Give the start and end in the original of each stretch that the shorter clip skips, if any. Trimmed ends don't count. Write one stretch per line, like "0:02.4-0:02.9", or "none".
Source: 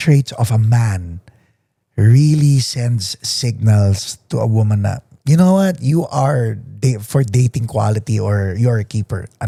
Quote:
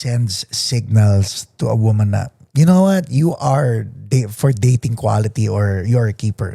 none